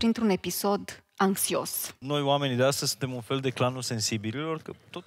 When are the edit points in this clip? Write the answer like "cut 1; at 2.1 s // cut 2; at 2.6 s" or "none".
cut 1; at 1.9 s